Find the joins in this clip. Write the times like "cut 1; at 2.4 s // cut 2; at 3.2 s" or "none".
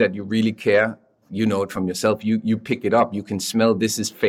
none